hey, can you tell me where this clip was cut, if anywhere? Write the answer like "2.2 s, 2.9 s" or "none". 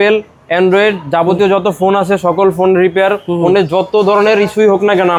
none